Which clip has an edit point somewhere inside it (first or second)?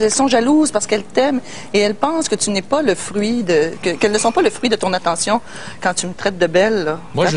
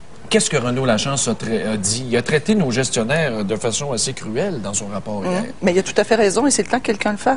second